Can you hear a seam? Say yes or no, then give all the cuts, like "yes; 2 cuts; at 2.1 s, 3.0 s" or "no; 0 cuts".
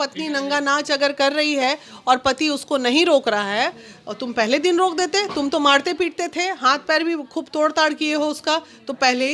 no; 0 cuts